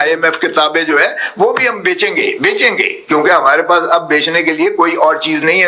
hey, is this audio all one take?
yes; 0 cuts

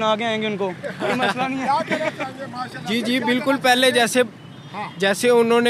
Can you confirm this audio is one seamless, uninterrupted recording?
yes; 0 cuts

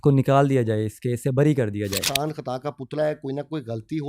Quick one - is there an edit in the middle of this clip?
yes; 1 cut; at 2.1 s

